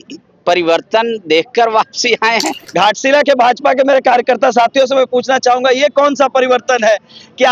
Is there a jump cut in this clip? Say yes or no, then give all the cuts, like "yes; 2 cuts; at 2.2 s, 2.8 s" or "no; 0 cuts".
yes; 1 cut; at 2.6 s